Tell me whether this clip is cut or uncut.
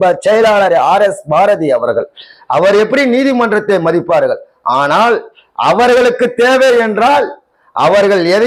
uncut